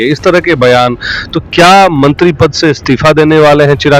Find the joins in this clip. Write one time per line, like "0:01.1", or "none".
none